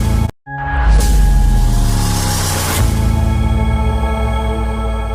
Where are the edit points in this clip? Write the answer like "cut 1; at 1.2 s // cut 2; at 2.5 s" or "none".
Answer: none